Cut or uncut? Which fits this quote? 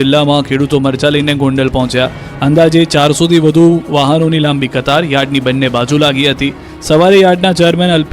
cut